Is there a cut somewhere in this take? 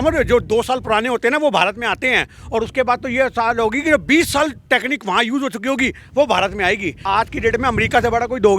yes; 1 cut; at 7.0 s

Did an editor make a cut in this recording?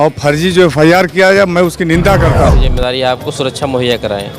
yes; 1 cut; at 2.7 s

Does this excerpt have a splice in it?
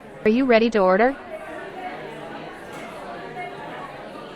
yes; 1 cut; at 1.2 s

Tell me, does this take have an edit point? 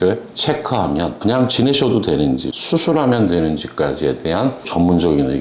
yes; 2 cuts; at 2.5 s, 4.7 s

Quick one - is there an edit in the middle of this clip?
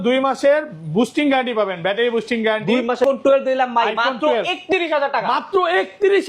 yes; 1 cut; at 3.0 s

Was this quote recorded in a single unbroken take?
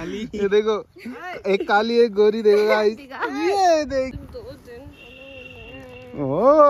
no; 1 cut; at 4.1 s

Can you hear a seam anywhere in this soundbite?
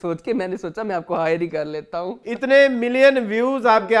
yes; 1 cut; at 2.2 s

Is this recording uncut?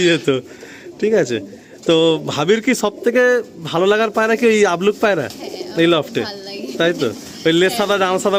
yes; 0 cuts

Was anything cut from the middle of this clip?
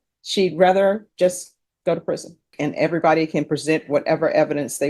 yes; 1 cut; at 2.5 s

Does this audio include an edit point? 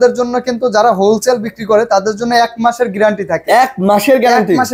no; 0 cuts

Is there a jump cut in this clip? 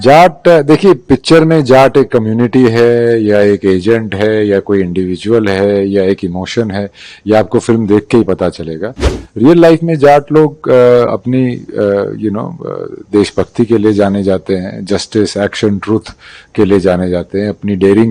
no; 0 cuts

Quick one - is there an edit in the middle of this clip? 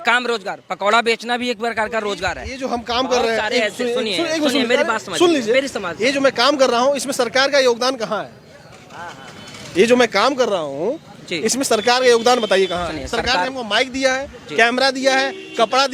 no; 0 cuts

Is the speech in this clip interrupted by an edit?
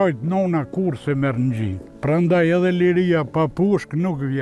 yes; 1 cut; at 1.9 s

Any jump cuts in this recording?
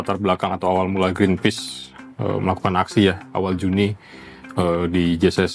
no; 0 cuts

